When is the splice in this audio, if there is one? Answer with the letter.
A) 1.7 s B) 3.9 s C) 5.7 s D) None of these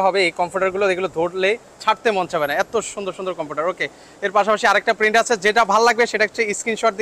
D